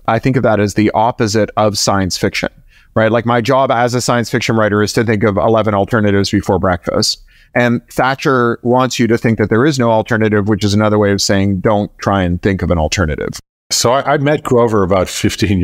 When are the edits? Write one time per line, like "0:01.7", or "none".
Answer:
0:13.3